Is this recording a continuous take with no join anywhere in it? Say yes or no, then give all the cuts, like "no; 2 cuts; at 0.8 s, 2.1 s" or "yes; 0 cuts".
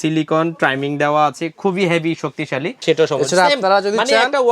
no; 1 cut; at 2.7 s